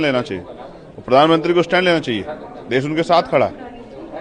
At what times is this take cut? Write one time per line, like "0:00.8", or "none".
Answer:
none